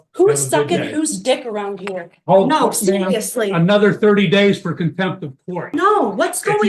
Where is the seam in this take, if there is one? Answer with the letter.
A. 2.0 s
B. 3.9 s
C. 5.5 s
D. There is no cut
C